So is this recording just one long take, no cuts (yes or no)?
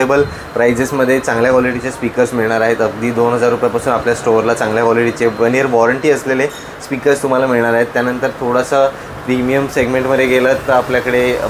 yes